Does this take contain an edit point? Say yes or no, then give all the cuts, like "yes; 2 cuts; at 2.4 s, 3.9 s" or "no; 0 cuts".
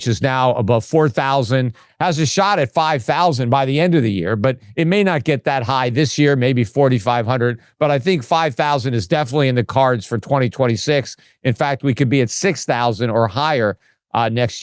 no; 0 cuts